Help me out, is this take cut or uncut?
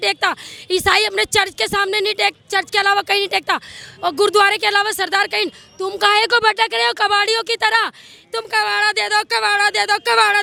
uncut